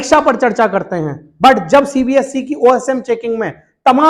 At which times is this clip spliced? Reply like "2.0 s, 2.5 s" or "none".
none